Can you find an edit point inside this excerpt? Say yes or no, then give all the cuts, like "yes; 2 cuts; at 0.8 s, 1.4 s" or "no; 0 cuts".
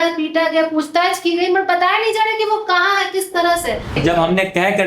yes; 1 cut; at 3.9 s